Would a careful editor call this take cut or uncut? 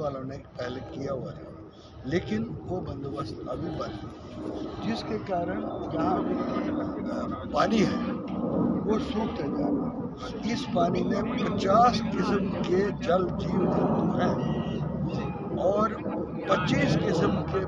uncut